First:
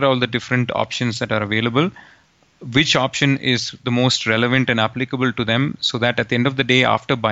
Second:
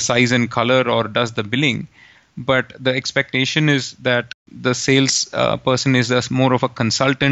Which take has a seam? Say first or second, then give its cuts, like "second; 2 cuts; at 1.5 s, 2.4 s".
second; 1 cut; at 4.4 s